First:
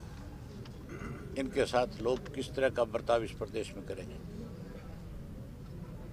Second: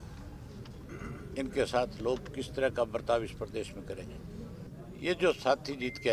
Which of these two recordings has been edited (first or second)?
second